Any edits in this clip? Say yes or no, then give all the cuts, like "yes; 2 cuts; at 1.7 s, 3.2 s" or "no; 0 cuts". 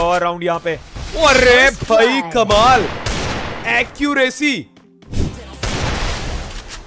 no; 0 cuts